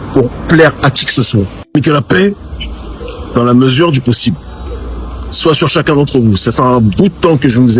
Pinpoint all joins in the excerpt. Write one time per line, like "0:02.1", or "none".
0:01.7